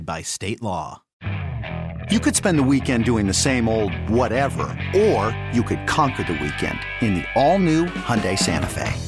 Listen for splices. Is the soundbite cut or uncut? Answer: cut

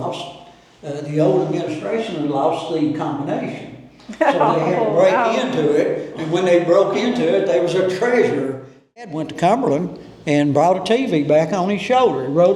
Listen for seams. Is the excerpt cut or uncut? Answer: cut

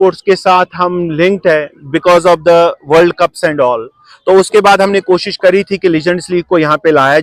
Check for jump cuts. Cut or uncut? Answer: uncut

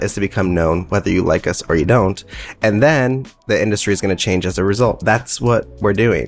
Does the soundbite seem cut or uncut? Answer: cut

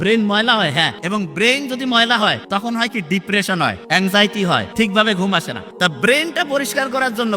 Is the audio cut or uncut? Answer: cut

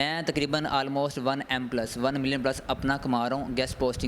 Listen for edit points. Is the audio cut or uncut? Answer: uncut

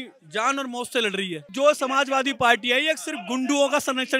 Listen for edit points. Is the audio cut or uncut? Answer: cut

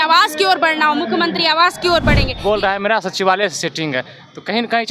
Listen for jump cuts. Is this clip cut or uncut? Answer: cut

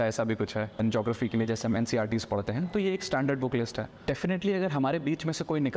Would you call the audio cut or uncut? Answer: cut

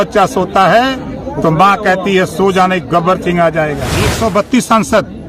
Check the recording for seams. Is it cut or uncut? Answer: cut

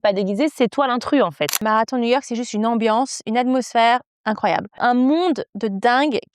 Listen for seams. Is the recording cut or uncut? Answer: cut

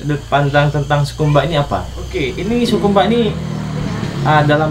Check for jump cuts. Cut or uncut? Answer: cut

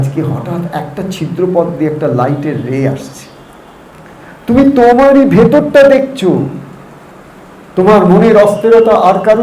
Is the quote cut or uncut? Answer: cut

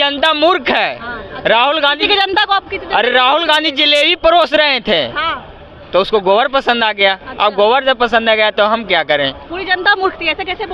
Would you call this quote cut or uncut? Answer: uncut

